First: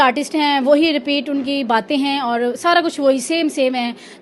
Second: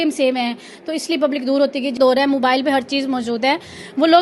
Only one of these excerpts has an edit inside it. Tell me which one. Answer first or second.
second